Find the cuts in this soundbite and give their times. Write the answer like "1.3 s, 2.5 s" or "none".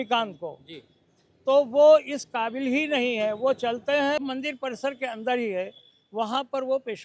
4.2 s